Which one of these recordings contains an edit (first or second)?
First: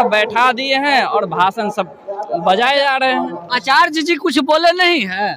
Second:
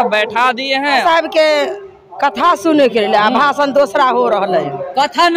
second